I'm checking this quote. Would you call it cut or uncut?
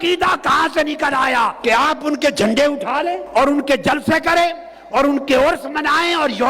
cut